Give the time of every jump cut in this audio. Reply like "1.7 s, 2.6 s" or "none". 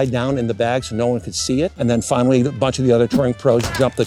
1.7 s